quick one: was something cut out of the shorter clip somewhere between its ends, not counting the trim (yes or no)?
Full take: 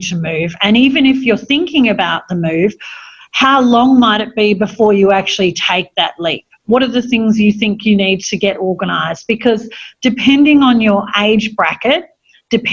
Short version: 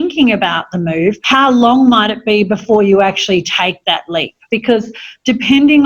yes